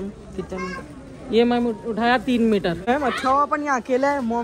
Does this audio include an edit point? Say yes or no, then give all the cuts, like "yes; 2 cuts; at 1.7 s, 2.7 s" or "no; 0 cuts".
yes; 1 cut; at 2.8 s